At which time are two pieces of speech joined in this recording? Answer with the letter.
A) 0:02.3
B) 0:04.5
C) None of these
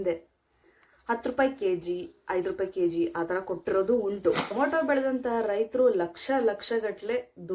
B